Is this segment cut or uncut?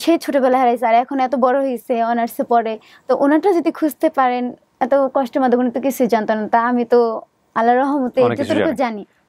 uncut